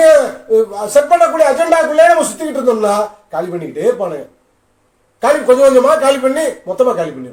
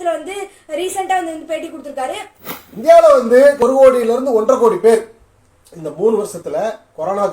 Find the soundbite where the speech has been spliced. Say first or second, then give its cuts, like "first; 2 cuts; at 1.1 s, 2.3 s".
second; 2 cuts; at 2.3 s, 3.6 s